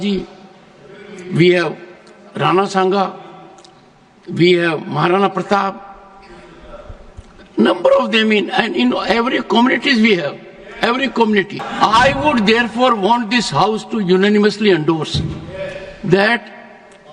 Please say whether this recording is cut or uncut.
cut